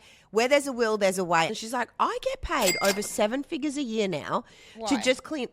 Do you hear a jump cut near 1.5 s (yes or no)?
yes